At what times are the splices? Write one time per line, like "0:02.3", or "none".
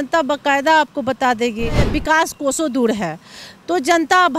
0:01.9

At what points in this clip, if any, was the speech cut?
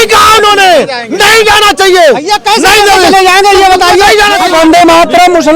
0:04.4

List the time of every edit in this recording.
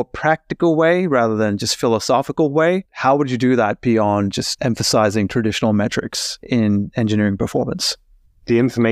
none

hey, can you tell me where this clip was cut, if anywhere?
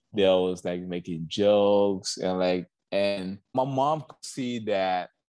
none

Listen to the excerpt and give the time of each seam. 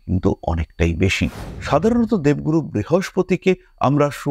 0:01.4

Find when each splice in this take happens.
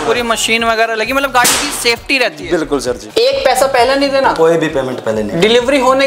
0:03.0

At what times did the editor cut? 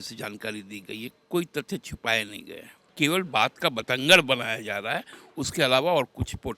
0:02.9

